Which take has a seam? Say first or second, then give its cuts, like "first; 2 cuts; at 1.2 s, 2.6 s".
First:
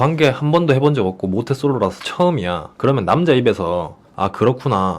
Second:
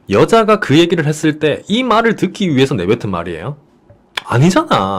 first; 1 cut; at 4.0 s